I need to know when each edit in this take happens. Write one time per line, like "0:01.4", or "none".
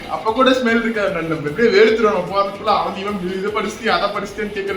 none